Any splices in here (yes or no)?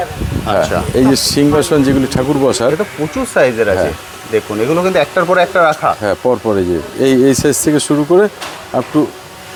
no